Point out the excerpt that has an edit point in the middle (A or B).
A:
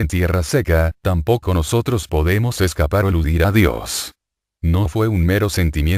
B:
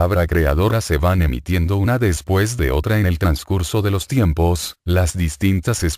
B